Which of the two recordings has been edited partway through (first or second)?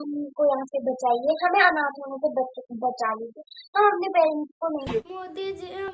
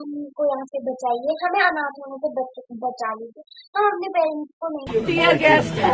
first